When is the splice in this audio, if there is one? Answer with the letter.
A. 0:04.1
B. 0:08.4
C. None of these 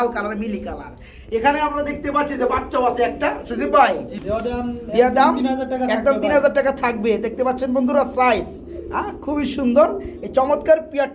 A